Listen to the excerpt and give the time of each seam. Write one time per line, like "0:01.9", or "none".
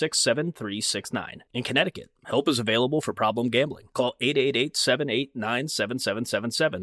none